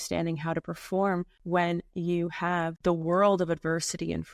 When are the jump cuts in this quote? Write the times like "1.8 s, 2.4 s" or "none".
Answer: 1.3 s, 2.8 s